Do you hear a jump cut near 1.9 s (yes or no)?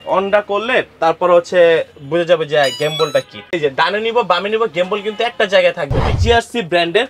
no